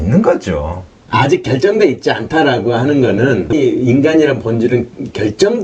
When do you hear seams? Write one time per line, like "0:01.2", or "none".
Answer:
0:03.5